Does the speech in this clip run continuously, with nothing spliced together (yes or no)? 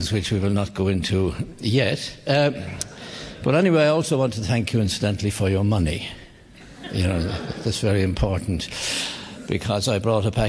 no